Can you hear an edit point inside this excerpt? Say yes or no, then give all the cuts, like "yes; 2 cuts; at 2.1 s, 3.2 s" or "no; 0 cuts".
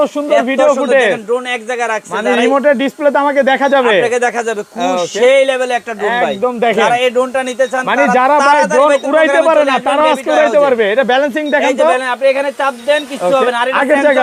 no; 0 cuts